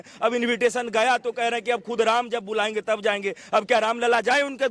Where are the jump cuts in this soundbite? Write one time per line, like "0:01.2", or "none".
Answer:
none

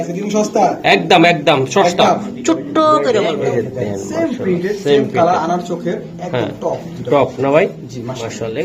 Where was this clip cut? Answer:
0:03.4

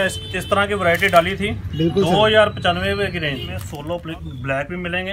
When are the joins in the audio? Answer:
0:03.7

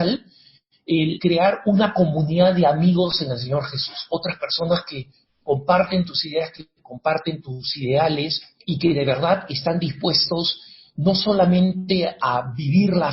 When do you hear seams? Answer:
0:01.2
0:07.4
0:08.5
0:12.1

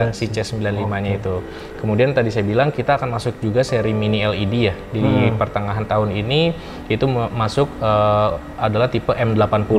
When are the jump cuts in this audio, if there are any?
none

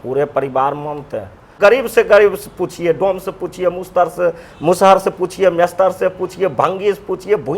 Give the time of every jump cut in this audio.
0:01.5

